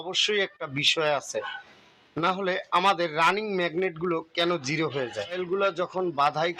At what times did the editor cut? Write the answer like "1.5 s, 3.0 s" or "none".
5.4 s